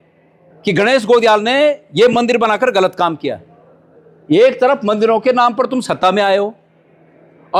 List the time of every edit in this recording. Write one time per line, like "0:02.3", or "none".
none